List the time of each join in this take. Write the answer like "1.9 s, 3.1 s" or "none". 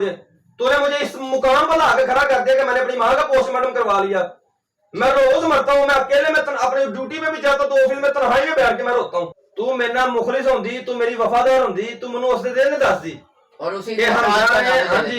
9.4 s